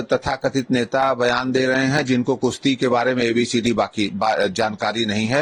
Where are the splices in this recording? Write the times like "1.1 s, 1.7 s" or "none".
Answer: none